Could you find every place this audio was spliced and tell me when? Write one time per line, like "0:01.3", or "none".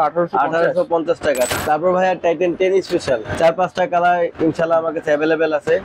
0:01.5
0:03.3

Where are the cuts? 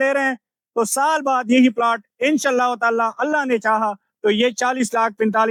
none

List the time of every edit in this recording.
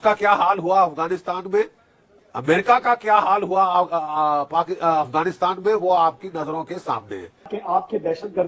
0:07.6

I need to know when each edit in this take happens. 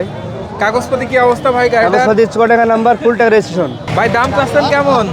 0:03.8

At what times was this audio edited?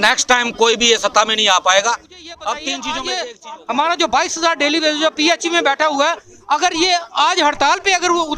0:02.9

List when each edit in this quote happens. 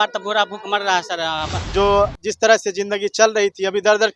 0:01.6

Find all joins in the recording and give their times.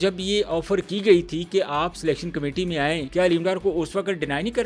0:03.0

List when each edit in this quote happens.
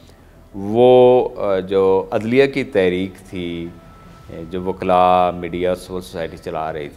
none

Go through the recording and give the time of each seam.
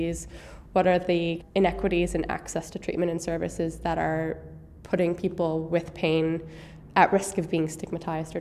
0:01.4

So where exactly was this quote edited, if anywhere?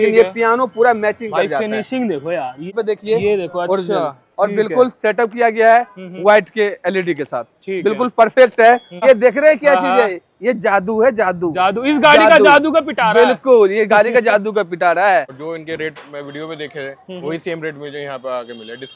0:02.7
0:09.0
0:15.3

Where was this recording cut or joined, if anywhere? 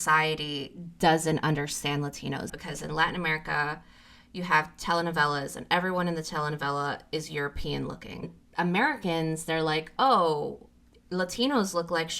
0:02.5
0:08.4

